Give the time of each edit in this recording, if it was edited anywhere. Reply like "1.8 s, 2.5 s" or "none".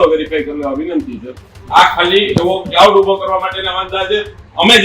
1.5 s